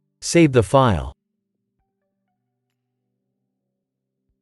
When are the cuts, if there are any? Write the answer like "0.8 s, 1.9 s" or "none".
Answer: 1.8 s